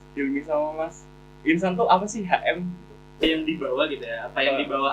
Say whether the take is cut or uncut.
cut